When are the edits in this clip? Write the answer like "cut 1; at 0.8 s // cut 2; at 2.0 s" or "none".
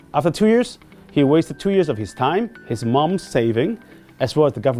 cut 1; at 2.6 s